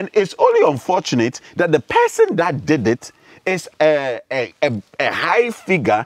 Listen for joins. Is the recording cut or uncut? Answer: uncut